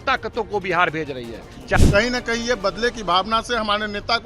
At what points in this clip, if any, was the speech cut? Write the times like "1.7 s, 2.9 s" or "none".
1.8 s